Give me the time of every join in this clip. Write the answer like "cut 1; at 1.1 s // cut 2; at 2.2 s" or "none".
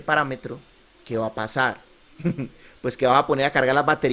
none